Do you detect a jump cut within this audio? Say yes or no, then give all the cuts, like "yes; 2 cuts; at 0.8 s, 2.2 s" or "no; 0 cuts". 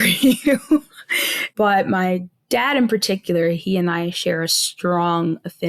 yes; 1 cut; at 1.4 s